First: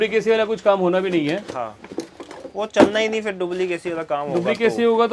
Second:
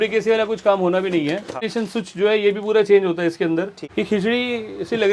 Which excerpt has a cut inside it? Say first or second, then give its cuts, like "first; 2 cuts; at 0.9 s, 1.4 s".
second; 2 cuts; at 1.6 s, 3.8 s